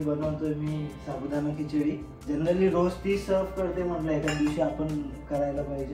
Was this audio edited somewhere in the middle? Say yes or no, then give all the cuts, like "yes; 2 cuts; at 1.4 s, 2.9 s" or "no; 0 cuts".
yes; 1 cut; at 2.1 s